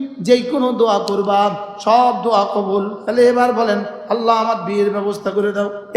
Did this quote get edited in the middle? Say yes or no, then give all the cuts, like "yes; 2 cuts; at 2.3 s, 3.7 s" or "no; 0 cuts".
yes; 1 cut; at 3.0 s